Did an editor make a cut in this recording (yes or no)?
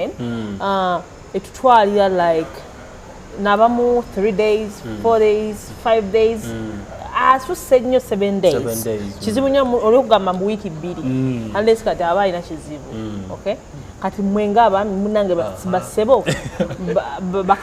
no